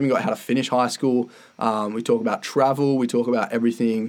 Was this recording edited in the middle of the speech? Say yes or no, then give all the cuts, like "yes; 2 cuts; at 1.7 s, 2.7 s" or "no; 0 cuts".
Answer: no; 0 cuts